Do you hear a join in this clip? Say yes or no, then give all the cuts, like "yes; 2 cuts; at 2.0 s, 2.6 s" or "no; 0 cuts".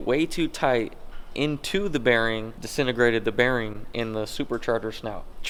no; 0 cuts